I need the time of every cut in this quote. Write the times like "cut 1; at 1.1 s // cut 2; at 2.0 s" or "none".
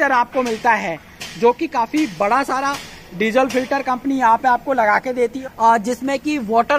none